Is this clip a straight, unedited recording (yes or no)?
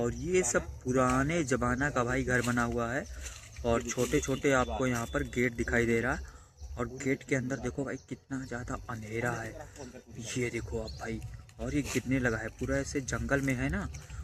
yes